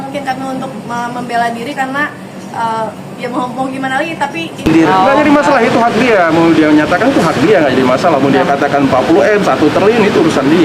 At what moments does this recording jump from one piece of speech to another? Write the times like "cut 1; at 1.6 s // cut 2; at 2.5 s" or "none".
cut 1; at 4.7 s